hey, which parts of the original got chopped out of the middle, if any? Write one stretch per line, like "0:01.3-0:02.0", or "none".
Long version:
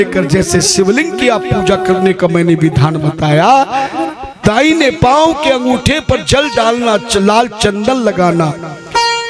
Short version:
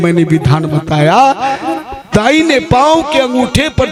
none